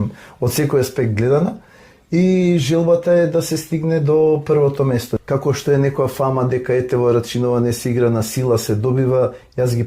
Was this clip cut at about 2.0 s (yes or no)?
no